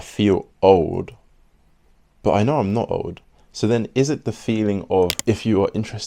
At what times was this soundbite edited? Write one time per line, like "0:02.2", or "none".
0:05.2